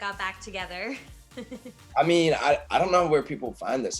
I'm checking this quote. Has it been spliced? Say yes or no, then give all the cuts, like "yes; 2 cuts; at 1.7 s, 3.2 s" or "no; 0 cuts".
yes; 2 cuts; at 1.8 s, 2.6 s